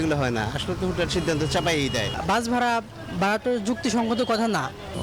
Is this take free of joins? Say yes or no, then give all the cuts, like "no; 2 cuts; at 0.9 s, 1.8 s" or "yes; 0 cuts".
no; 1 cut; at 2.1 s